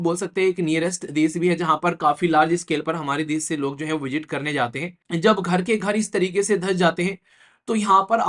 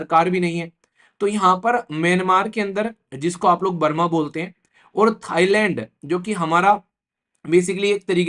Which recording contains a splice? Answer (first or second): first